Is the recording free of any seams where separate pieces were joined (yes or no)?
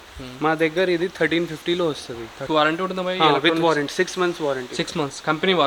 yes